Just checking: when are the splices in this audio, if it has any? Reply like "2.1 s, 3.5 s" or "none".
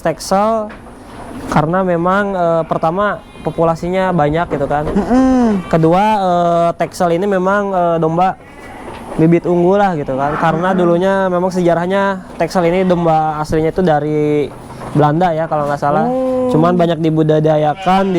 none